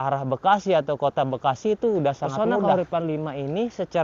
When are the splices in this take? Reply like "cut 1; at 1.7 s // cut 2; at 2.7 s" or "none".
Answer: cut 1; at 2.5 s